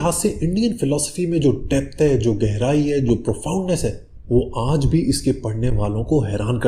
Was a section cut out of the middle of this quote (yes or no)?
no